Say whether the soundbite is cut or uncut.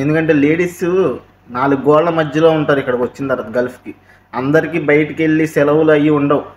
uncut